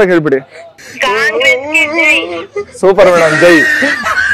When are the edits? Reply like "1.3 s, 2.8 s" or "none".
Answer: none